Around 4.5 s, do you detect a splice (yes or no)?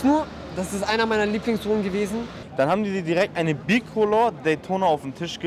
no